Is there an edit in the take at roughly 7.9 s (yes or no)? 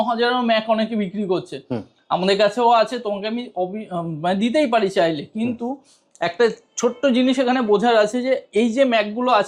no